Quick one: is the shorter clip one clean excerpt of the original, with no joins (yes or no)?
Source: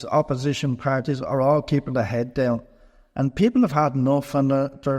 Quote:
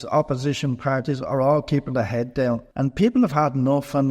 no